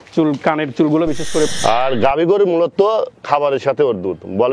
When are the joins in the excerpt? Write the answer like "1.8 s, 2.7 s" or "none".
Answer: 1.5 s